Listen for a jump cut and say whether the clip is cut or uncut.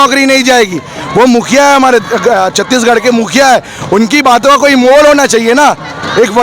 uncut